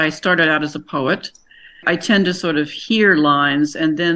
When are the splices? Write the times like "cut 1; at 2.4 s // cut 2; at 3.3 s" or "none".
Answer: cut 1; at 1.8 s